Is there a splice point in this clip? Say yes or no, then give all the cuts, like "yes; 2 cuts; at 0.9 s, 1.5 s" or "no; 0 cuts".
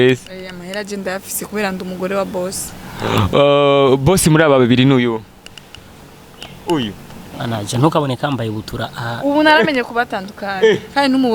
no; 0 cuts